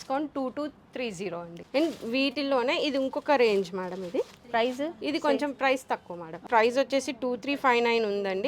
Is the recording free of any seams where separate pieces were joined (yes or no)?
no